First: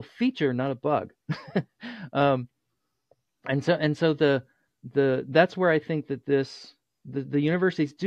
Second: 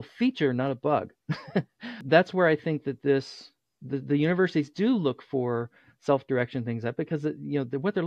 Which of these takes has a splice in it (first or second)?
second